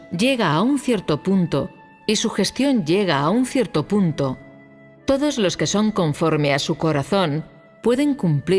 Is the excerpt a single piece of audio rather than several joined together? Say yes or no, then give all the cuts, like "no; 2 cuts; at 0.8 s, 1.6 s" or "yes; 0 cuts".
yes; 0 cuts